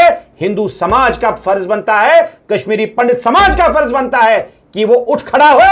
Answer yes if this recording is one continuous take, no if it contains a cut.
yes